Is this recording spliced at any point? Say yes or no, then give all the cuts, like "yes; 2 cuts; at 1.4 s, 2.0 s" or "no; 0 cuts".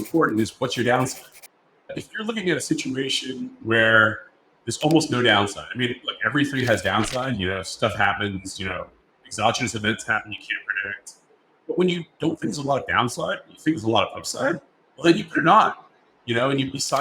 yes; 1 cut; at 1.9 s